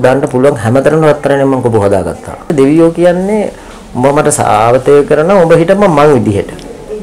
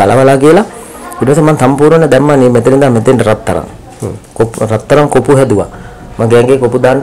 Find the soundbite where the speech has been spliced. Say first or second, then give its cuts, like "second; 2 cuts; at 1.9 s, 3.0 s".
first; 1 cut; at 2.4 s